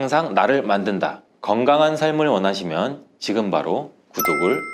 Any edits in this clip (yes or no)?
no